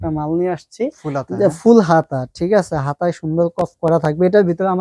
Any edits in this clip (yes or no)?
no